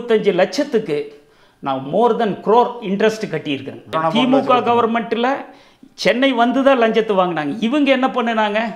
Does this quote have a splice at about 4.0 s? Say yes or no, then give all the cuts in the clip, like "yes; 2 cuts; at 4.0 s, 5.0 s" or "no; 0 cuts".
yes; 1 cut; at 4.0 s